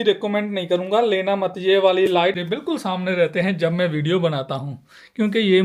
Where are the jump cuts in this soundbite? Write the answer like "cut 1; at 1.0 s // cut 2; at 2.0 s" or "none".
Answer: cut 1; at 2.3 s